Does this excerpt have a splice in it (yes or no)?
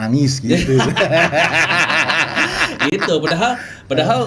no